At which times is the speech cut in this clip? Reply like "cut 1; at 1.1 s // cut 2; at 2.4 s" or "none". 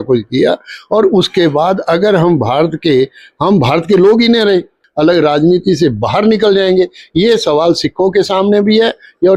cut 1; at 4.8 s